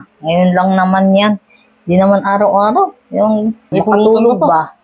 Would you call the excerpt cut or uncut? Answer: cut